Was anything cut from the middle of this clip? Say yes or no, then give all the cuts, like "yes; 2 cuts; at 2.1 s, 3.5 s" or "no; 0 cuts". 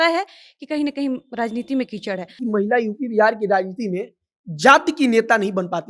yes; 1 cut; at 2.4 s